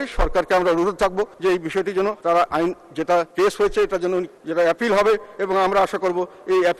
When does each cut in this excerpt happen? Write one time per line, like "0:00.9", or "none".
0:01.3
0:02.2
0:03.3
0:04.4